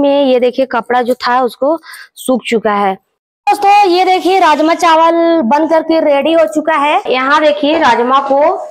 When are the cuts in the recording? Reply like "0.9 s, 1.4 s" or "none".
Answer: 3.1 s, 7.1 s

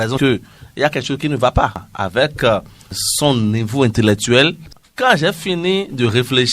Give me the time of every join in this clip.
1.9 s, 4.8 s

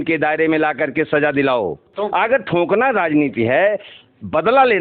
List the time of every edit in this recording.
1.9 s

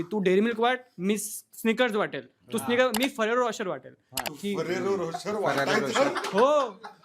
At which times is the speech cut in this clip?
4.3 s

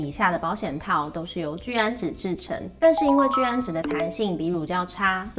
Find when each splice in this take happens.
none

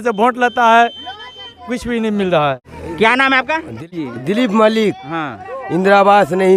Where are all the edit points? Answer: none

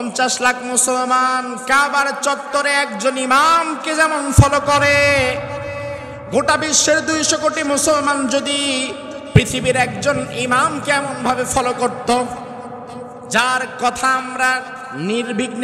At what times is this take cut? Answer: none

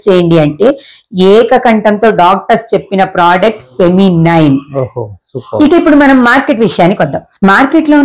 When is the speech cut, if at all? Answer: none

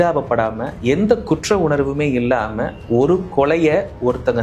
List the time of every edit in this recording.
none

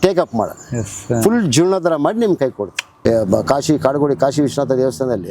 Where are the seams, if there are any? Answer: 2.9 s

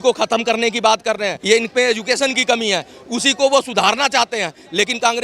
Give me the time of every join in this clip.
1.3 s

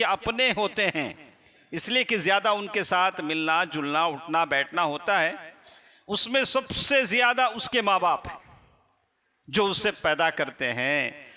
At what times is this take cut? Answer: none

